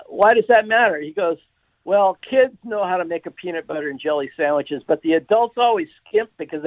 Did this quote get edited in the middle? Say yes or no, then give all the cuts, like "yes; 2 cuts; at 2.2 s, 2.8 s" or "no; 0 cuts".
no; 0 cuts